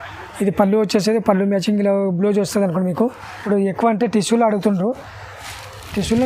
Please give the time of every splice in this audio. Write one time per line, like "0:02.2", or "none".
0:03.4